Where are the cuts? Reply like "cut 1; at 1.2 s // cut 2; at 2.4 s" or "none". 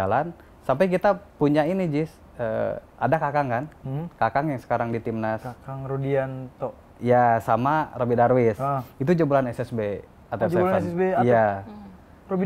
none